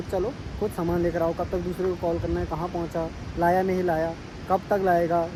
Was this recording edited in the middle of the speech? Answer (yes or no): no